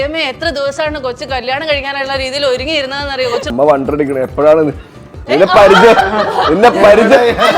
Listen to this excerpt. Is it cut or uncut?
cut